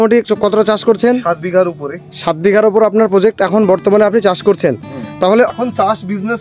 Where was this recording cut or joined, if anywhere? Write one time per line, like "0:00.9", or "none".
0:05.5